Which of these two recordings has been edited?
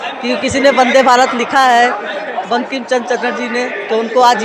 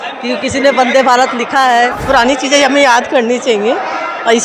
second; 1 cut; at 2.0 s

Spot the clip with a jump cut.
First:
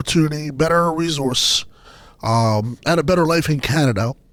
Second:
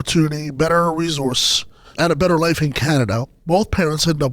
second; 2 cuts; at 1.9 s, 3.3 s

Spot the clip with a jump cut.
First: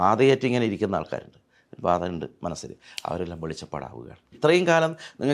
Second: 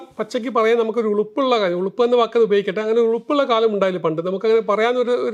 first; 1 cut; at 4.3 s

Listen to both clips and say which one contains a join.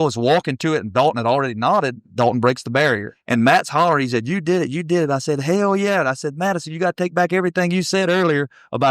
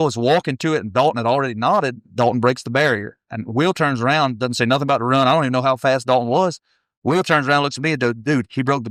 first; 1 cut; at 3.1 s

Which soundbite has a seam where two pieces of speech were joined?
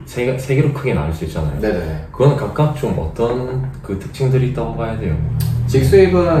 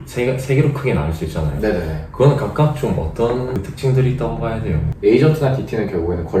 second; 2 cuts; at 3.6 s, 4.8 s

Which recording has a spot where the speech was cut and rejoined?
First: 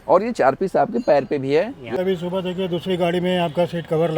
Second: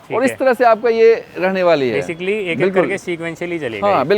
first; 1 cut; at 1.9 s

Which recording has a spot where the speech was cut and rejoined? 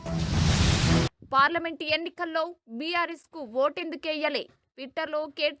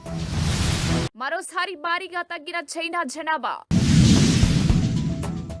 first; 1 cut; at 1.1 s

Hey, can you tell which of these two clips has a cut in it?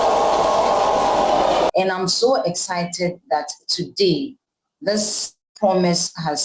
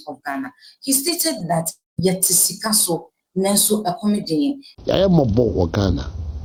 first; 1 cut; at 1.7 s

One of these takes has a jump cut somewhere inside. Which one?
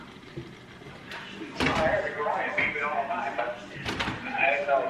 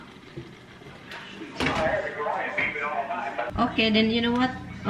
second; 1 cut; at 3.5 s

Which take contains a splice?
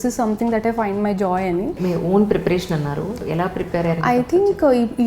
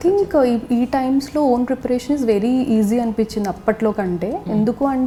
first; 2 cuts; at 1.8 s, 3.2 s

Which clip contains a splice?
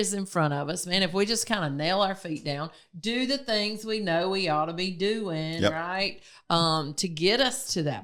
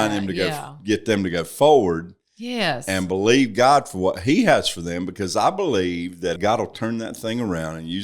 second; 1 cut; at 6.4 s

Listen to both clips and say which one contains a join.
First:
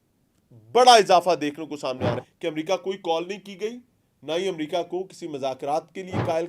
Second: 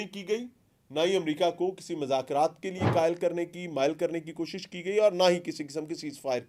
first; 1 cut; at 2.2 s

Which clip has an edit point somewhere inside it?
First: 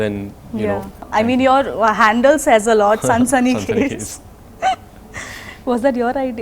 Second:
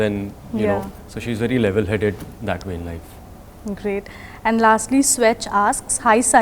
first; 1 cut; at 1.1 s

